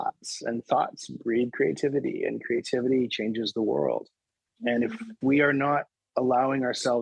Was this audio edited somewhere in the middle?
no; 0 cuts

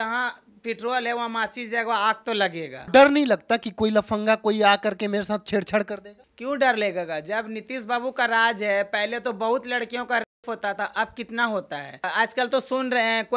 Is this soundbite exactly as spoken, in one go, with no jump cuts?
no; 2 cuts; at 2.8 s, 12.0 s

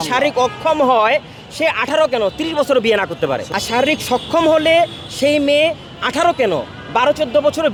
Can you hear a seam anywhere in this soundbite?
no; 0 cuts

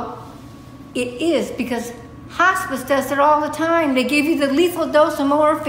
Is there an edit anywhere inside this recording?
no; 0 cuts

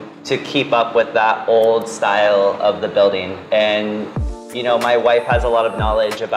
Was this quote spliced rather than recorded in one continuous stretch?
no; 0 cuts

